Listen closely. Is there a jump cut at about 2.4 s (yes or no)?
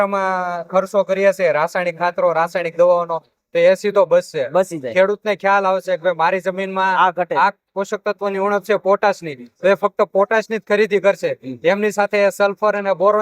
no